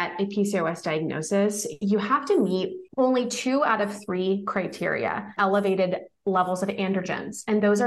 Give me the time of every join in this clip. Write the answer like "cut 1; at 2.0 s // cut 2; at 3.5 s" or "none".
cut 1; at 5.4 s